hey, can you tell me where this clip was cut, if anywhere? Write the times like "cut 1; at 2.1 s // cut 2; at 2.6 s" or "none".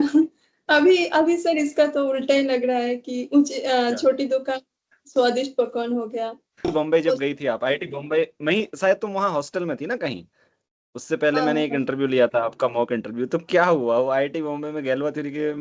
cut 1; at 6.7 s